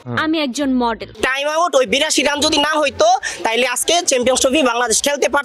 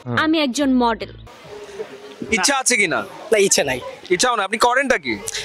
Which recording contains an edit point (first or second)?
first